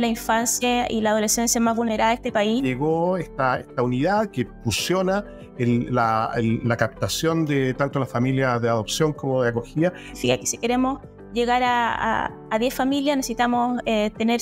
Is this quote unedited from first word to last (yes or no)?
no